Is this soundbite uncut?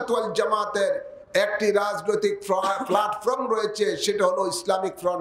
yes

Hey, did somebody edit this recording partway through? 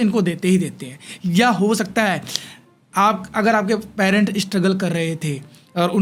no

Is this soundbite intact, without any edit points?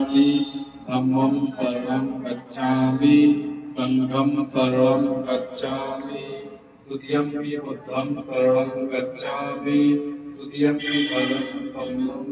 yes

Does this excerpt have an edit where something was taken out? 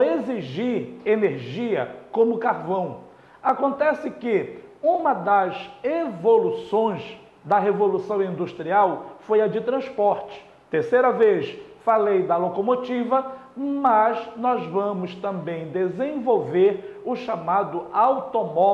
no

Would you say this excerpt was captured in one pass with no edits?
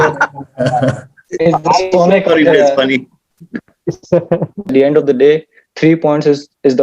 no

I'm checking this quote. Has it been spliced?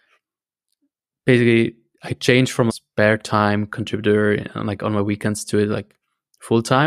yes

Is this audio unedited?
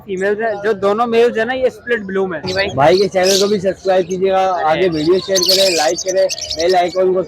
no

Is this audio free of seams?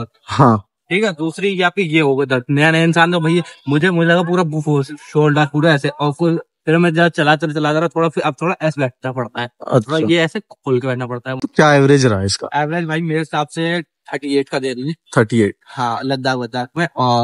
no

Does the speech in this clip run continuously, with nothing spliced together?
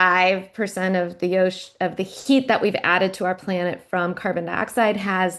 yes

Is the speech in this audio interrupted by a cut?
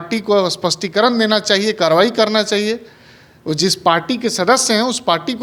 no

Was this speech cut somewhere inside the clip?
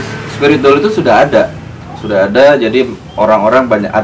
no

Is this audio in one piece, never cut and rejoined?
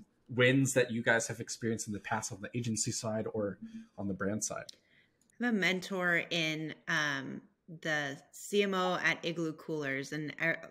yes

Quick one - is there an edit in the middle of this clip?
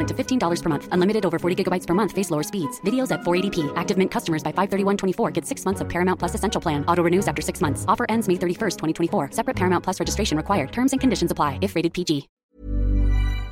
yes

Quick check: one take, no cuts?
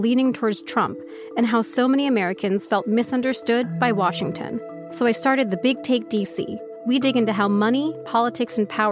yes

